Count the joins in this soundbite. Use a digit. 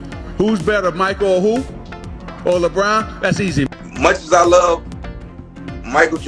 1